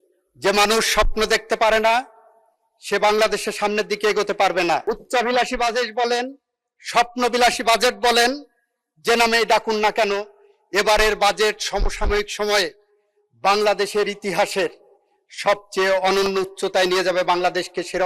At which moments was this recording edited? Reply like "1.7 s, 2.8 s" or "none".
4.8 s